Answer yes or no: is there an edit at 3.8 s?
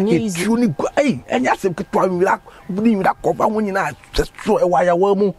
no